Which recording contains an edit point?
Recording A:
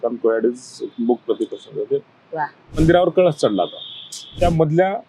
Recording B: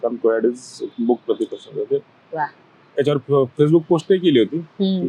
A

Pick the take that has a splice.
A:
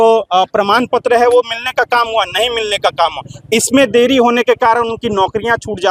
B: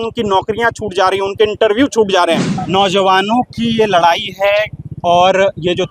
B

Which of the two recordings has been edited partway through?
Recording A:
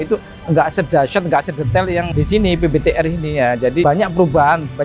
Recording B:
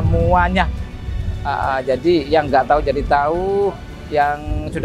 A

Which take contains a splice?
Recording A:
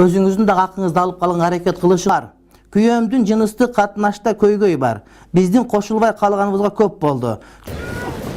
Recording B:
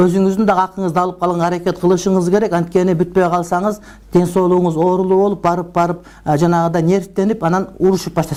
A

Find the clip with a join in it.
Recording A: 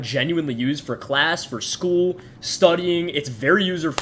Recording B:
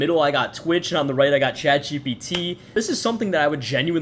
B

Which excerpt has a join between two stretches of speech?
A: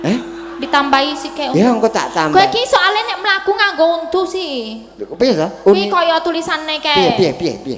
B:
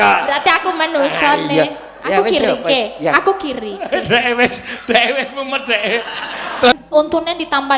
B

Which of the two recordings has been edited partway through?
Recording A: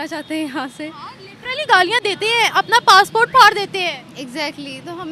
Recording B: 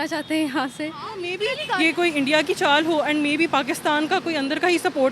B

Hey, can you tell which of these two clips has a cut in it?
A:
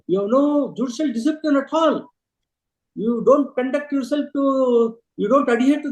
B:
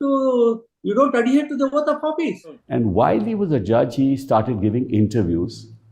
B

